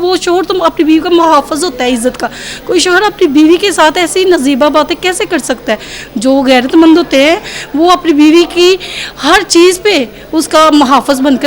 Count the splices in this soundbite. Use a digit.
0